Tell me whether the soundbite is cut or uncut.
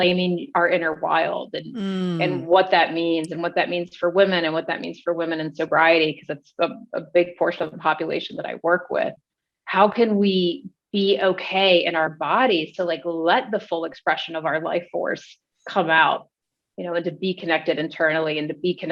cut